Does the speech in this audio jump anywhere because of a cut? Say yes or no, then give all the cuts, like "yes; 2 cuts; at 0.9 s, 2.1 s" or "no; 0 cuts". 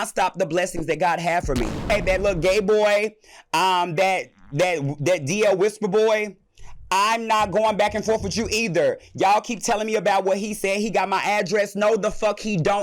yes; 1 cut; at 1.9 s